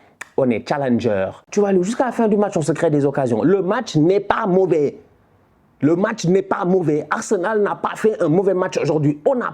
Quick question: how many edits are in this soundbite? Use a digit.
1